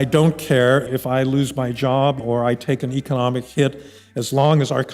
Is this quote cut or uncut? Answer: cut